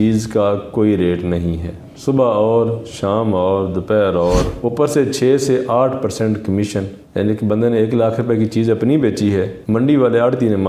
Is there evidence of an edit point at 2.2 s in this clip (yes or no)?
no